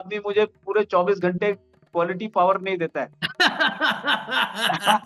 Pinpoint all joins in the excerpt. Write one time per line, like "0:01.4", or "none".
0:03.2